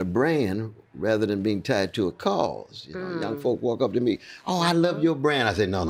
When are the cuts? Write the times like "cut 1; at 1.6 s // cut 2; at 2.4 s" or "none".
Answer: none